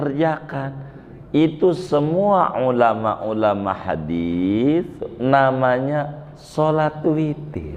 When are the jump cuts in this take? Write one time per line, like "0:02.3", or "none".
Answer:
none